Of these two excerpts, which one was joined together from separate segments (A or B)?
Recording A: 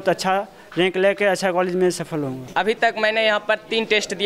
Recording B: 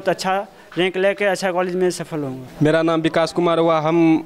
A